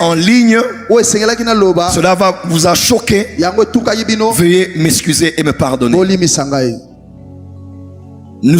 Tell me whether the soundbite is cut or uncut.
uncut